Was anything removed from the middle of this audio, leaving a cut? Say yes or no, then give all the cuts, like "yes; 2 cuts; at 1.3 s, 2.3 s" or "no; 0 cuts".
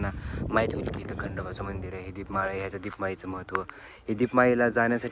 no; 0 cuts